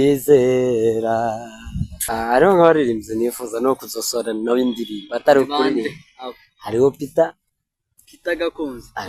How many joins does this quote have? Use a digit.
1